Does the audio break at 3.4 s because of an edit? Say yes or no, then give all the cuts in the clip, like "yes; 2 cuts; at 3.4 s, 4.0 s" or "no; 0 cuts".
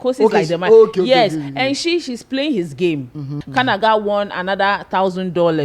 yes; 1 cut; at 3.4 s